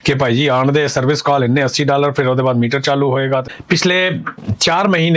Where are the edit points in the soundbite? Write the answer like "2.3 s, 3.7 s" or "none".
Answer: 3.5 s

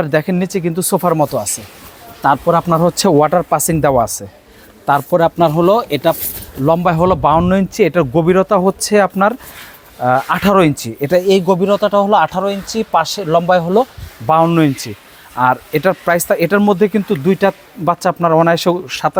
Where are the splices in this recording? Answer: none

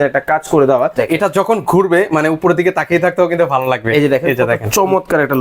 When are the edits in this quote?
1.0 s

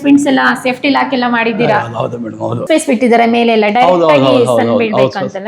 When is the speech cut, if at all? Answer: 2.6 s

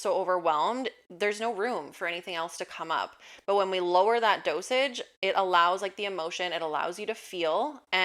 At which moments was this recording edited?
none

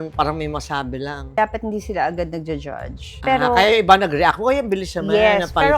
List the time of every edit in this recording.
1.3 s, 3.1 s

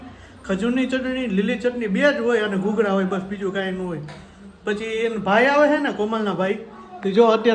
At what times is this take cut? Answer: none

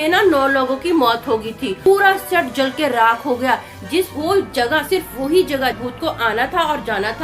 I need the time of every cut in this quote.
1.8 s, 5.8 s

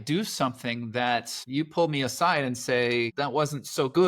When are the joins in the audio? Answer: 1.4 s, 3.1 s

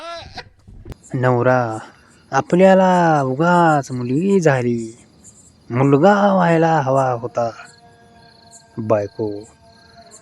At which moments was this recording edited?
1.0 s

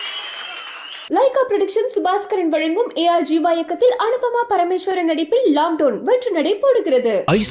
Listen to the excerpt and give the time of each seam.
1.0 s

